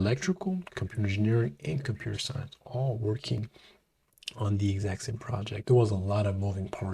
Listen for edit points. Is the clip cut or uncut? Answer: cut